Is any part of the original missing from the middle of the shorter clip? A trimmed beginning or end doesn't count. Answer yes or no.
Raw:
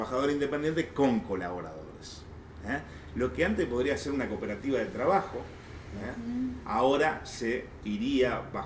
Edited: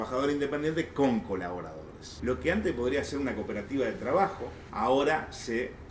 yes